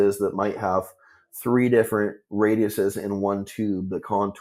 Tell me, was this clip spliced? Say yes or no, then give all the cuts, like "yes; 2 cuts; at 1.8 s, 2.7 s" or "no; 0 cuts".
no; 0 cuts